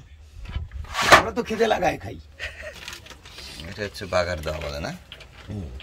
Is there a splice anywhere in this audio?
yes; 1 cut; at 2.8 s

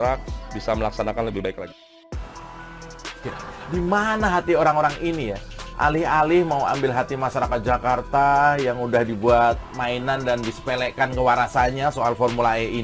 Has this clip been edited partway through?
no; 0 cuts

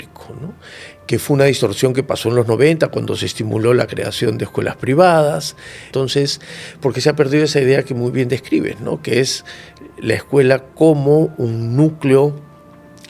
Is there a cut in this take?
yes; 1 cut; at 5.9 s

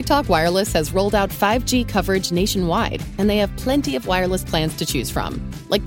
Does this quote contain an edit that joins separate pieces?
no; 0 cuts

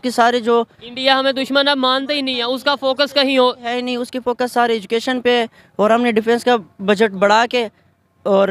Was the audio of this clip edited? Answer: no; 0 cuts

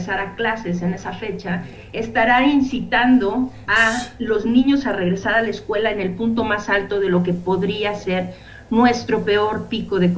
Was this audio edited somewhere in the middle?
no; 0 cuts

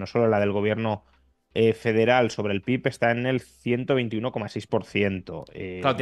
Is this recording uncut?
yes; 0 cuts

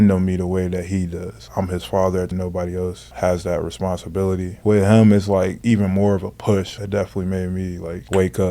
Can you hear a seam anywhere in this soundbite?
yes; 3 cuts; at 2.3 s, 4.6 s, 6.8 s

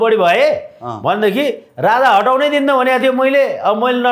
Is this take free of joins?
yes; 0 cuts

